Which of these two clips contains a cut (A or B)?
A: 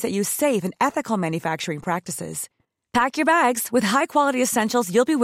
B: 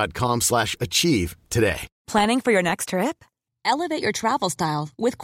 B